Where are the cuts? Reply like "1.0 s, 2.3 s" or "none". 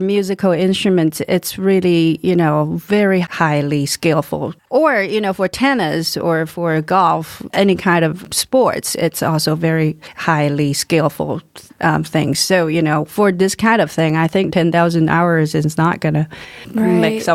3.2 s, 4.6 s

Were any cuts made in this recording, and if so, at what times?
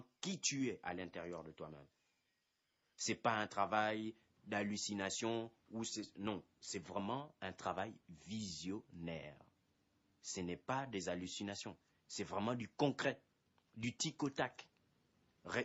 1.8 s

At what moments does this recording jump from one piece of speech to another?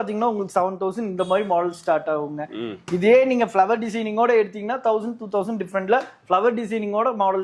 none

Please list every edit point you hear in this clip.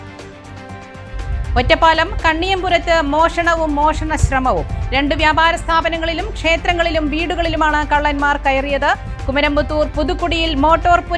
1.1 s

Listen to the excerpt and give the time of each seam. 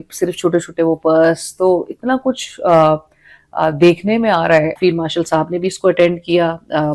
none

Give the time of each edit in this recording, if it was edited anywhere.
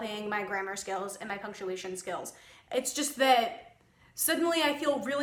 none

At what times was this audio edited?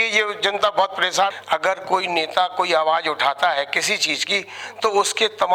1.3 s

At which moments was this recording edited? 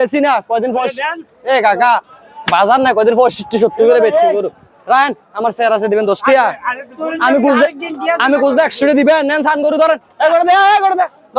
none

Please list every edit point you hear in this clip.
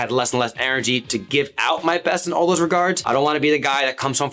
1.1 s, 3.0 s

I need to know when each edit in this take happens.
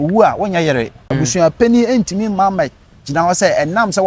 1.0 s

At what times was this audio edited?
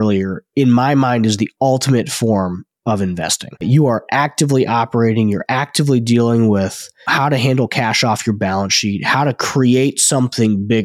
none

